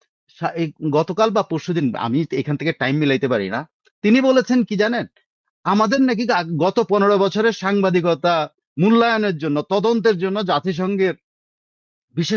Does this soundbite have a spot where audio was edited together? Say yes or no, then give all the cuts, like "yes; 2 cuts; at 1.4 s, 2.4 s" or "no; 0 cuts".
no; 0 cuts